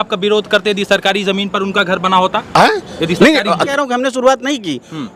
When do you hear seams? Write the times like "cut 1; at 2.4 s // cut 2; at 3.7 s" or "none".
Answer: cut 1; at 3.7 s